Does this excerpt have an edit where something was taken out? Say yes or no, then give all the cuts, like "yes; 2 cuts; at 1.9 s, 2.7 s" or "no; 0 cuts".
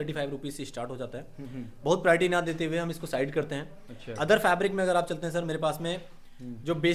no; 0 cuts